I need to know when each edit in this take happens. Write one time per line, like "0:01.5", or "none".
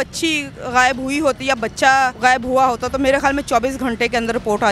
0:02.1